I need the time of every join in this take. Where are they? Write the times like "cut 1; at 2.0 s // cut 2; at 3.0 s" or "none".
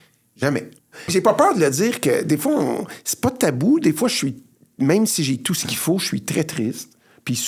cut 1; at 1.1 s